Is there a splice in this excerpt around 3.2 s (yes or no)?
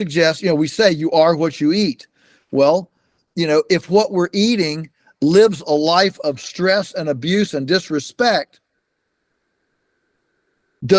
no